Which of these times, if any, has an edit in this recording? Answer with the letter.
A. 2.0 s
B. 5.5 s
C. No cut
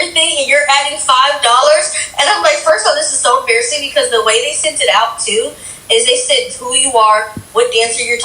A